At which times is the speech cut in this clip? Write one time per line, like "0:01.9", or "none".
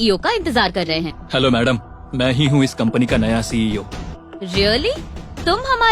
0:01.2
0:04.1